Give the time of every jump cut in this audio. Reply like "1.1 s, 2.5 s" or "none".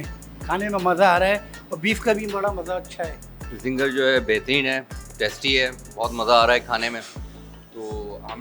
3.6 s